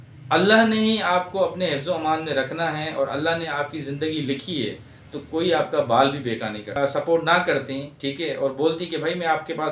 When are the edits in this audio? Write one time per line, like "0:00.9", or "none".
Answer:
0:06.8